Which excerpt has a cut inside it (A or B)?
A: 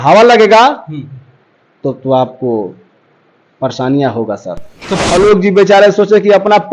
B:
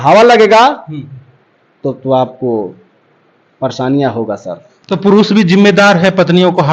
A